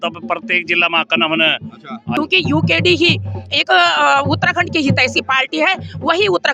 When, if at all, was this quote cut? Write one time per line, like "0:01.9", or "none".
0:02.1